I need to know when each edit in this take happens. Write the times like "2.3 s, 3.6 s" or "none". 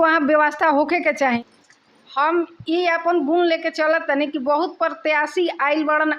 1.4 s